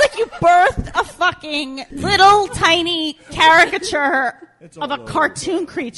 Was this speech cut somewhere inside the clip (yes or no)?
yes